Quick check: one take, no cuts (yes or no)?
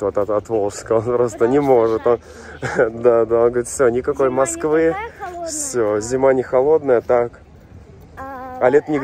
yes